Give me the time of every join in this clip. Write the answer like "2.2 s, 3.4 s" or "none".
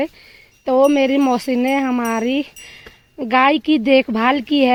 none